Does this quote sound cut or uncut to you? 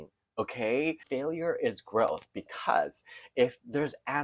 cut